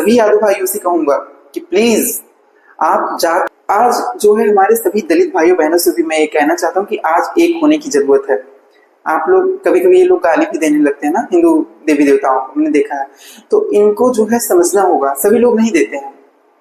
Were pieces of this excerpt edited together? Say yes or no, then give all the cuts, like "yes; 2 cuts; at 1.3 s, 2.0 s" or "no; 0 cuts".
yes; 1 cut; at 3.5 s